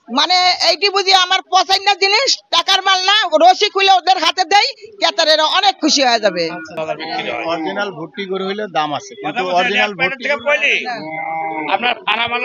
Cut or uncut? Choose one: cut